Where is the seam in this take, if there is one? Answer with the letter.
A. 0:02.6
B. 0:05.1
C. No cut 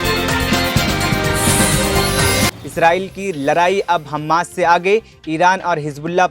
A